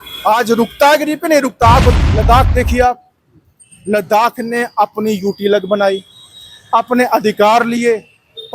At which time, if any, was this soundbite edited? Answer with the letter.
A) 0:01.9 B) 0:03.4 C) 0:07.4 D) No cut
A